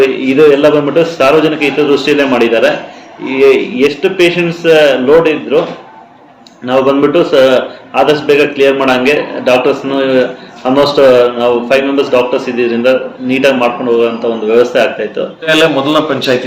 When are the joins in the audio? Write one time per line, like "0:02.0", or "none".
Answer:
0:15.5

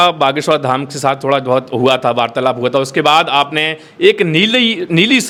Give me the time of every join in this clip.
none

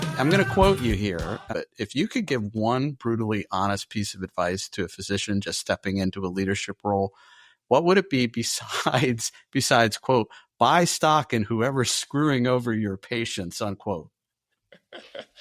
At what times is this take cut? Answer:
0:01.5

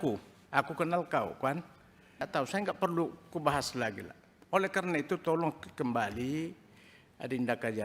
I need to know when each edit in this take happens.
0:02.3

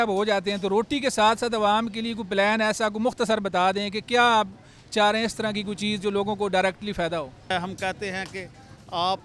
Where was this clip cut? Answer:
0:07.4

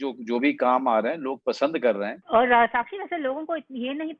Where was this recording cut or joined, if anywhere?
0:02.2

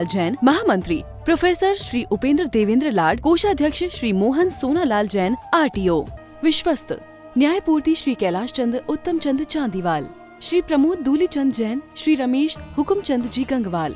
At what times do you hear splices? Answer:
0:06.2

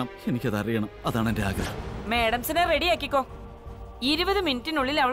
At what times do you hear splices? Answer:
0:01.7

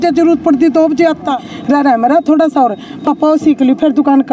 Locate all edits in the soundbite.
0:01.5

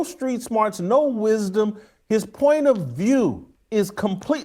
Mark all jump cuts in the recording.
0:03.5

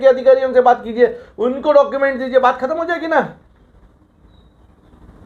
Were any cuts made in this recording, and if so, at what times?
none

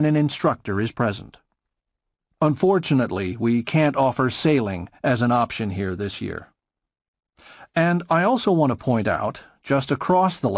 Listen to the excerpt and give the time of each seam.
none

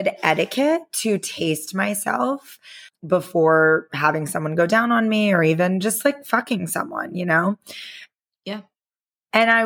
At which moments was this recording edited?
0:02.9

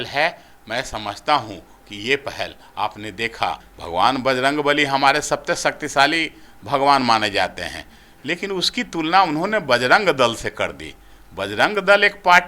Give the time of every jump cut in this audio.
0:03.7

